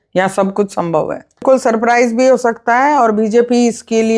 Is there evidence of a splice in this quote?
yes; 1 cut; at 1.4 s

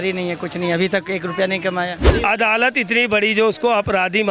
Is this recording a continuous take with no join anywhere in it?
no; 1 cut; at 2.0 s

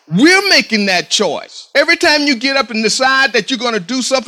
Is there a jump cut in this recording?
yes; 1 cut; at 1.5 s

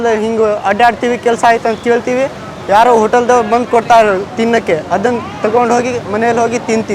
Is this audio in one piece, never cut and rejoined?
yes; 0 cuts

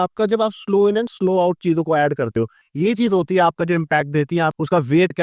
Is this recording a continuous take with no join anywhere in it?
yes; 0 cuts

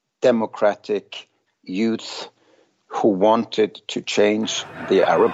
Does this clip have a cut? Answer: no; 0 cuts

